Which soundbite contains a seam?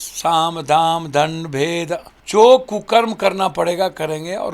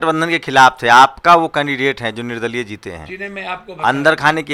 first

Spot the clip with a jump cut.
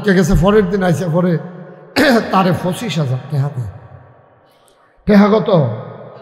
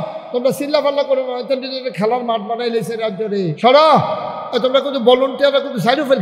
second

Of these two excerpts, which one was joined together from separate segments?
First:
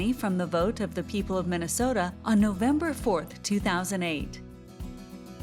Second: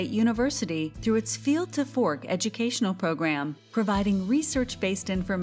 first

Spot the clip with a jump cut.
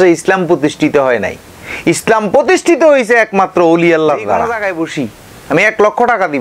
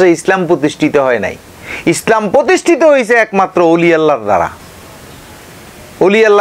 first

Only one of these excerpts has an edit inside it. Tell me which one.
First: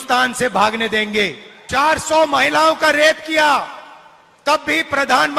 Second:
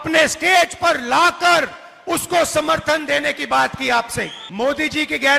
second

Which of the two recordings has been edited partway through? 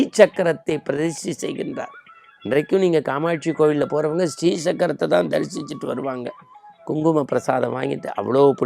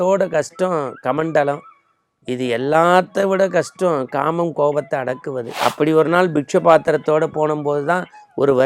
second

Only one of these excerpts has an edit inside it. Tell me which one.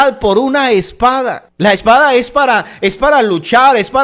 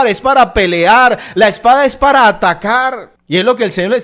first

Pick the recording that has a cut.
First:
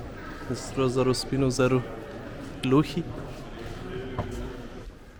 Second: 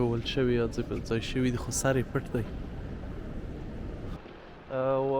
second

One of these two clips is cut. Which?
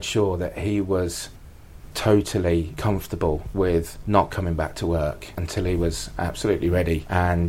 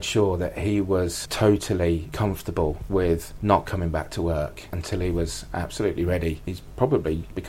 second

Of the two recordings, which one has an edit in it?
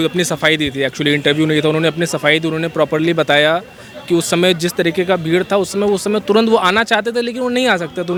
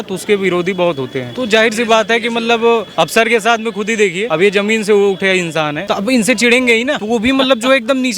second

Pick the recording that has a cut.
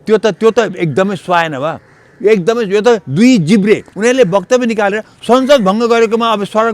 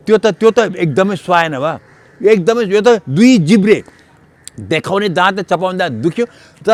first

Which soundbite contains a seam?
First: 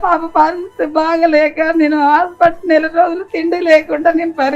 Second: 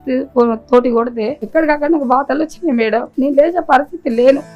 second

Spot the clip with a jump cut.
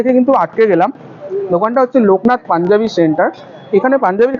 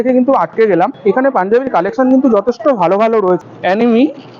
second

